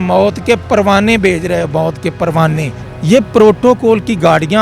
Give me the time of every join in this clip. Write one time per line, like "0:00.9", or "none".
0:02.8